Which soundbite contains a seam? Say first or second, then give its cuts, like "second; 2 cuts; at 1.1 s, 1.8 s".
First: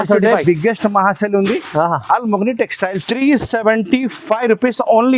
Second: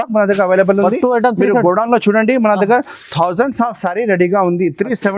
first; 1 cut; at 3.0 s